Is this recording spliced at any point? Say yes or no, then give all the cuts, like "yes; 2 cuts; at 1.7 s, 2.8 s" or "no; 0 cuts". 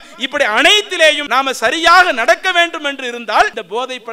yes; 1 cut; at 1.2 s